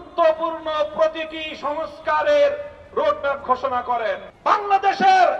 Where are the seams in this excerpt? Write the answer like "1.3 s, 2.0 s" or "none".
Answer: 4.3 s